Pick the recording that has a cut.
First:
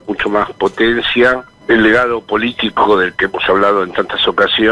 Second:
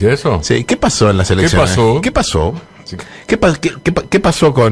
first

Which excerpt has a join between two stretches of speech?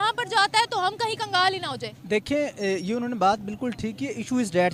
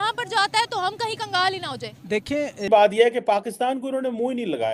second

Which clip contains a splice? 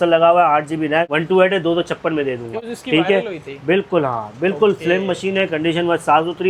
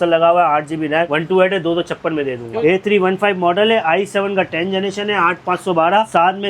second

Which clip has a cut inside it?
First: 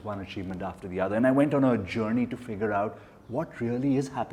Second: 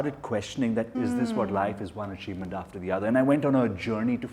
second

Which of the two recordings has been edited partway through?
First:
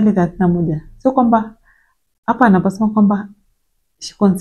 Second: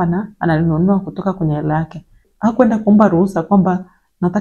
second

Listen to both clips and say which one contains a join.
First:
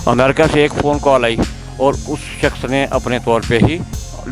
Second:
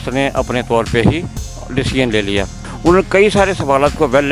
second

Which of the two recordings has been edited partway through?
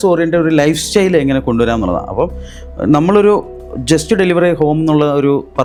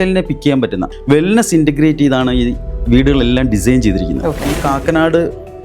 second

